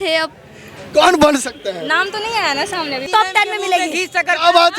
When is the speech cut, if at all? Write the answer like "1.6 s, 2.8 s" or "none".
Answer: 3.1 s